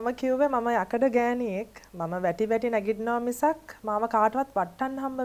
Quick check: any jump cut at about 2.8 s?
no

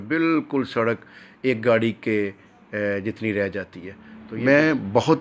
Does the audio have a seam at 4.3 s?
yes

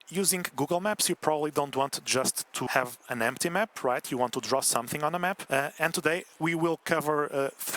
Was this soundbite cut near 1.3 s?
no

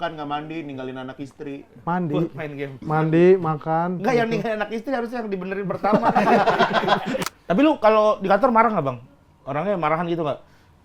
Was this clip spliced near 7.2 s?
yes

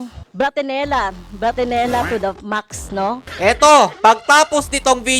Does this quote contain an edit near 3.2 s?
yes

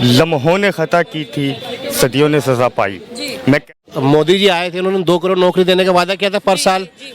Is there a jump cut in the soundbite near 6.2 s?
no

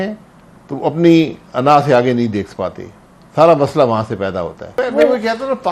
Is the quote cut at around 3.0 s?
no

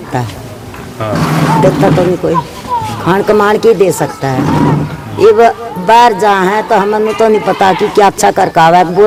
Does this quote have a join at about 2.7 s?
no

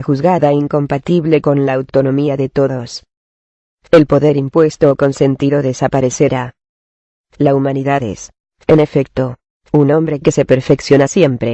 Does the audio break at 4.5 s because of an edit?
yes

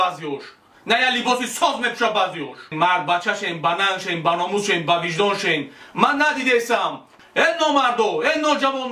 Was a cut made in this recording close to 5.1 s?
no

